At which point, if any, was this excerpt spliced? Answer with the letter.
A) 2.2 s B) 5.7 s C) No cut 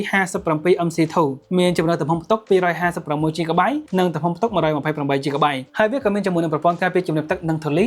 B